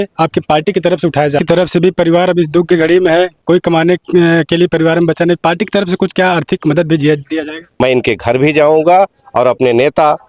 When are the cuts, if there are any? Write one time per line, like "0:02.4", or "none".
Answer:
0:01.4
0:07.6